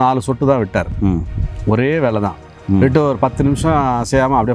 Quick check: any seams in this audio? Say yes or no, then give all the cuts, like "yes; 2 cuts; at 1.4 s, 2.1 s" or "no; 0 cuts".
no; 0 cuts